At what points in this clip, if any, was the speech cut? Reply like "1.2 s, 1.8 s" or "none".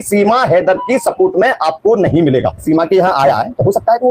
2.6 s